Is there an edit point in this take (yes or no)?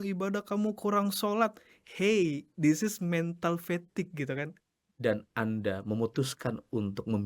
yes